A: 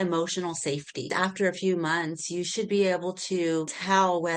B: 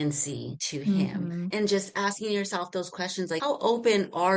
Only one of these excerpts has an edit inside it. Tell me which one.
A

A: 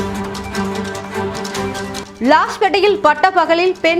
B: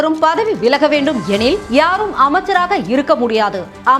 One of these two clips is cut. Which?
A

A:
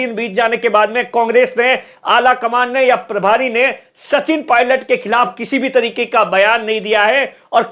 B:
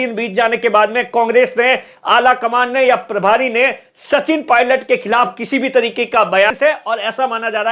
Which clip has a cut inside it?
B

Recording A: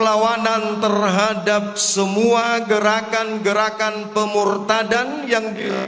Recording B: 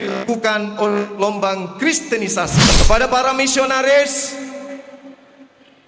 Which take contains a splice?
B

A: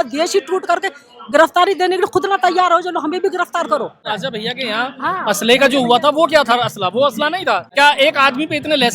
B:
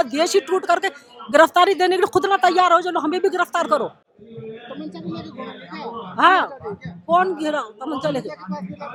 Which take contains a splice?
A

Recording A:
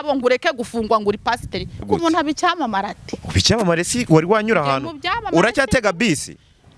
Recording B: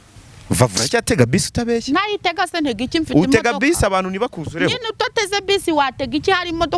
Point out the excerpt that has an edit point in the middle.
A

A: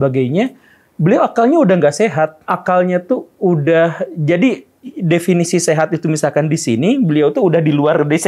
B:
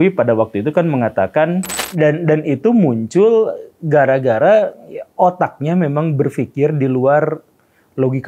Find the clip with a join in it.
B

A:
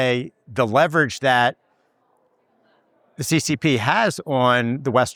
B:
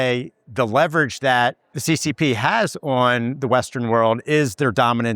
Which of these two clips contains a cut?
B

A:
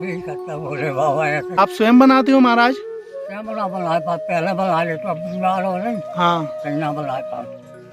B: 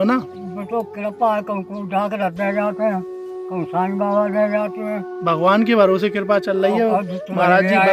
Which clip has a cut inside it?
A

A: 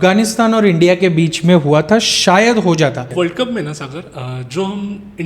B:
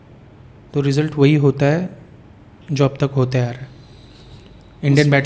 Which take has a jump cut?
A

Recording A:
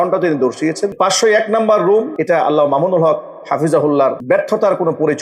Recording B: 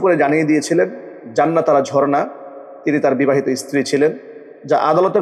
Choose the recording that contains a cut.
A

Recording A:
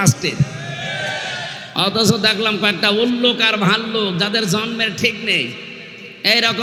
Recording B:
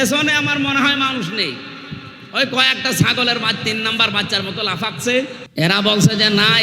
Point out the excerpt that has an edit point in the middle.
B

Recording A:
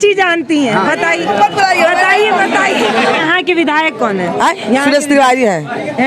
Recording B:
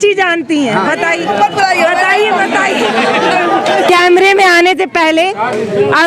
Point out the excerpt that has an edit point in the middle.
A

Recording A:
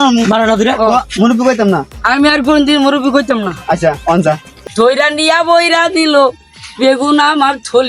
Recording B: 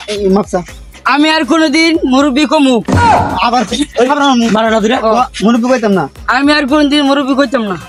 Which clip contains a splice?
A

